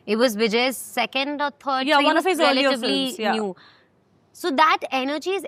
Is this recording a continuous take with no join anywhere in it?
yes; 0 cuts

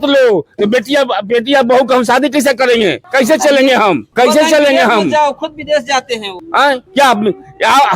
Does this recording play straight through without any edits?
no; 3 cuts; at 3.0 s, 4.1 s, 6.6 s

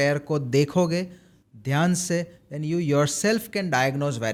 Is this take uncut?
yes; 0 cuts

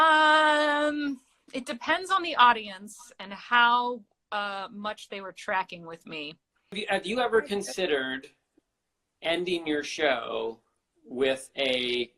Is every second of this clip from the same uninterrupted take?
no; 2 cuts; at 6.8 s, 8.5 s

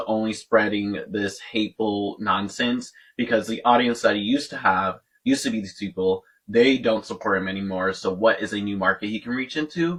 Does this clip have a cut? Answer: no; 0 cuts

